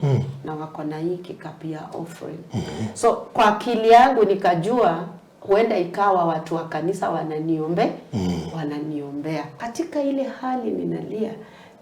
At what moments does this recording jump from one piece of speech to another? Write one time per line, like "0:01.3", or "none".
0:09.6